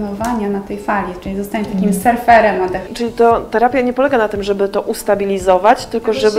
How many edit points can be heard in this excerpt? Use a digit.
1